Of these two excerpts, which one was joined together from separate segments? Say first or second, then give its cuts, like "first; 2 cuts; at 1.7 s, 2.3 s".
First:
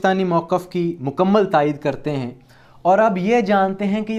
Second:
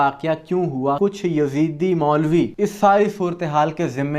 second; 2 cuts; at 1.0 s, 2.5 s